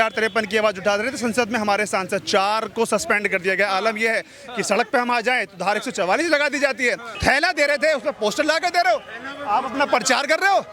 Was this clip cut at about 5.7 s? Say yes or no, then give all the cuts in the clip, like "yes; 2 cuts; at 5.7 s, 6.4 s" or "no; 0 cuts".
no; 1 cut; at 7.2 s